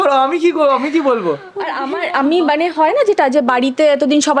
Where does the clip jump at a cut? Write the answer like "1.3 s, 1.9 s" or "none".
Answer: none